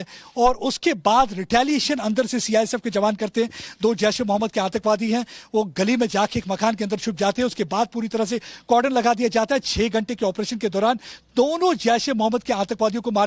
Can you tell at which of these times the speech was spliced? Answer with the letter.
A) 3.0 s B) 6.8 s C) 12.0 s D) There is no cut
C